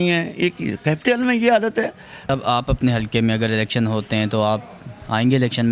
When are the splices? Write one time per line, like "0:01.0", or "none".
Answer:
0:02.2